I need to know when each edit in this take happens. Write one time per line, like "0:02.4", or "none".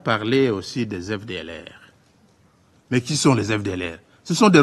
none